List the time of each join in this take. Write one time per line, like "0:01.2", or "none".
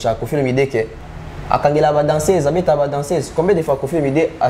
0:01.0